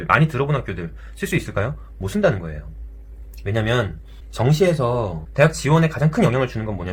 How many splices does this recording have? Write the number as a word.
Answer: zero